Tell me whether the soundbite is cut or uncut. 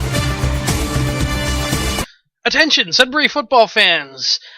cut